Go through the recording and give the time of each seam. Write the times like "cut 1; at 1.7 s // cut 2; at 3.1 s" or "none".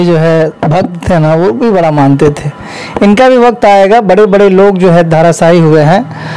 none